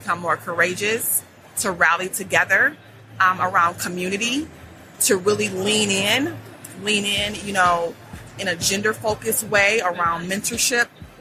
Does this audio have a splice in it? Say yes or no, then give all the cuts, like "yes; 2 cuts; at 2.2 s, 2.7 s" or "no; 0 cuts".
no; 0 cuts